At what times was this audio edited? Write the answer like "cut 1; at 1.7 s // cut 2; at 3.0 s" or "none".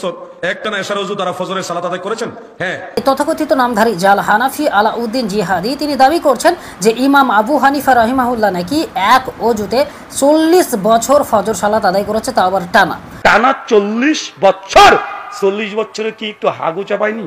cut 1; at 3.0 s // cut 2; at 13.1 s